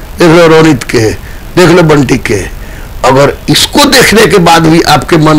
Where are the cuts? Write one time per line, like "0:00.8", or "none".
none